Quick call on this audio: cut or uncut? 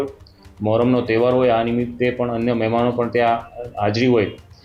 uncut